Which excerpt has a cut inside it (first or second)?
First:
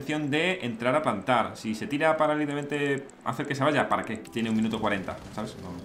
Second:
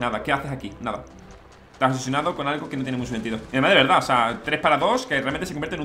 first